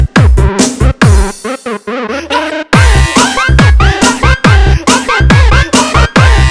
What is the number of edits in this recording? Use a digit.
1